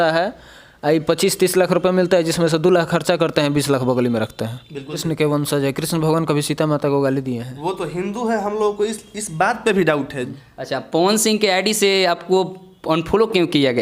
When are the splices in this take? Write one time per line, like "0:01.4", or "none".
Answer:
0:05.0
0:10.3